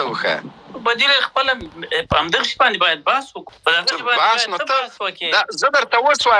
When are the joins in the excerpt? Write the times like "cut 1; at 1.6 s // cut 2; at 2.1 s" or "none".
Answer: cut 1; at 3.4 s